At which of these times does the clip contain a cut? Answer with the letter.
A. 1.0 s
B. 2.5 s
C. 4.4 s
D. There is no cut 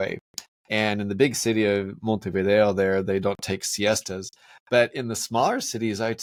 D